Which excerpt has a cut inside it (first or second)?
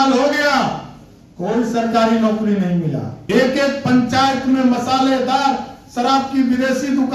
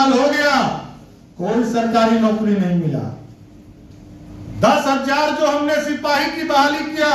first